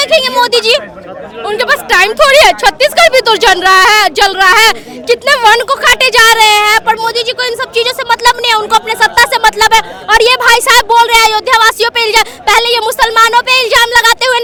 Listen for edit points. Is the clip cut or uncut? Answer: uncut